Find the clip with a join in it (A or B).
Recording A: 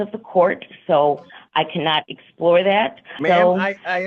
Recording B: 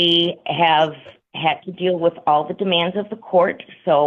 A